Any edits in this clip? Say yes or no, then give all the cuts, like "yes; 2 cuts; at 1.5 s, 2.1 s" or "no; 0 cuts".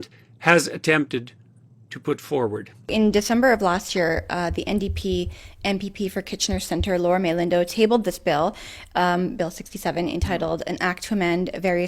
yes; 1 cut; at 2.8 s